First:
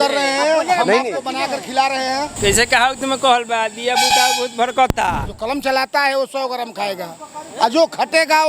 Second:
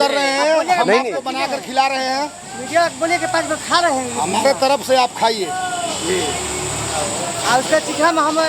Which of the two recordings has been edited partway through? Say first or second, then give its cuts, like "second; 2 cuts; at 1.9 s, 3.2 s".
first; 2 cuts; at 2.3 s, 5.3 s